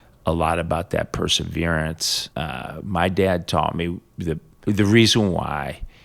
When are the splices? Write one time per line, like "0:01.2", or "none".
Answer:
0:02.1
0:04.5

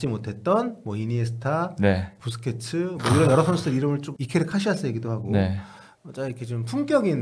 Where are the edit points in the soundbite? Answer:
0:02.2
0:04.2

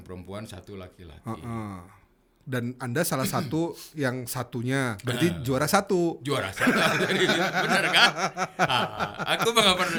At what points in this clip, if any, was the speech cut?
none

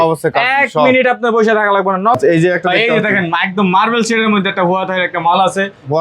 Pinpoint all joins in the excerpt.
0:02.2

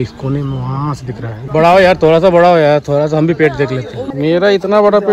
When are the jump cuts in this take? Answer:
0:01.4
0:04.0

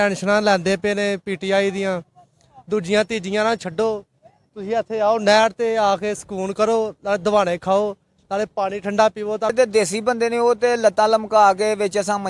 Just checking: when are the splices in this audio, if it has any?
0:09.5

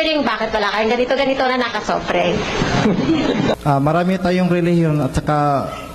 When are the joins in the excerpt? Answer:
0:03.5

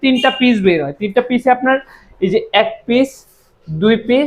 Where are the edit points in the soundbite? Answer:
none

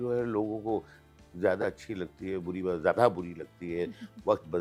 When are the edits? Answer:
none

